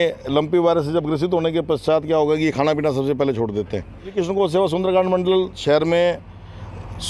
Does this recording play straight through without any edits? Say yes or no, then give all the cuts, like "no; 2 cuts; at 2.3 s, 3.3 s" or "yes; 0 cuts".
no; 1 cut; at 4.1 s